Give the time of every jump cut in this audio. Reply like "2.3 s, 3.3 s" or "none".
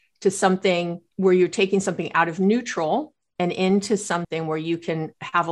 1.0 s, 4.3 s